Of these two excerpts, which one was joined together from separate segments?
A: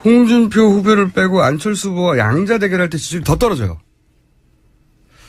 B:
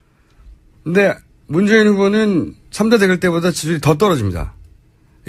A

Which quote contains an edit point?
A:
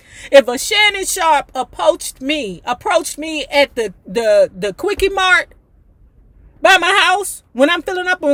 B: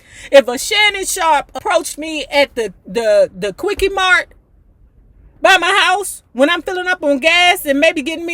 B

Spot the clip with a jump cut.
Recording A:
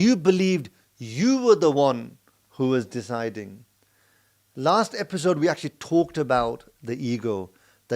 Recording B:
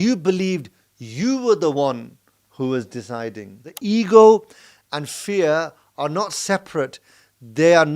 B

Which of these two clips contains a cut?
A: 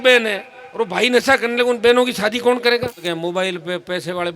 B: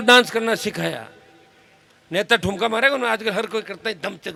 A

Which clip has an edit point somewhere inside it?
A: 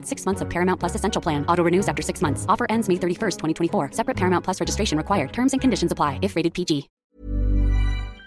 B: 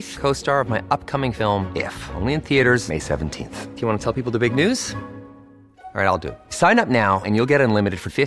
A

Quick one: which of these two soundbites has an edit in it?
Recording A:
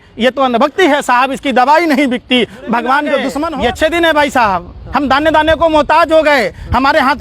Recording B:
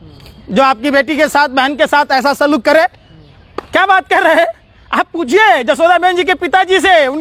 A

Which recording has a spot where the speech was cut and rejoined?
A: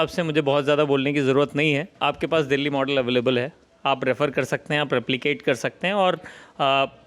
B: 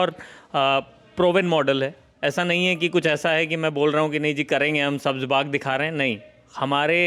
A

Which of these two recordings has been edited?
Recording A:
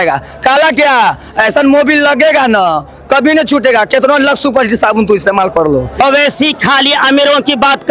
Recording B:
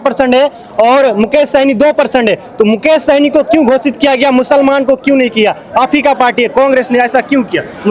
A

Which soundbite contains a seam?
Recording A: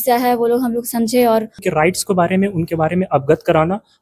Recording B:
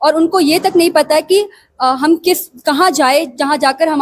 A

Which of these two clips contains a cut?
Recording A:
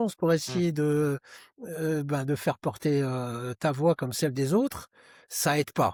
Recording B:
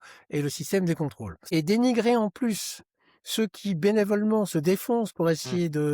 B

